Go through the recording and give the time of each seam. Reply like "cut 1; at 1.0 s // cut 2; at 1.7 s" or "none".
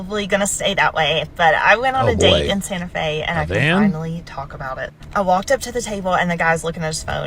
cut 1; at 1.4 s